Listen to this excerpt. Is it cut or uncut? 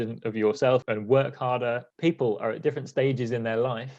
cut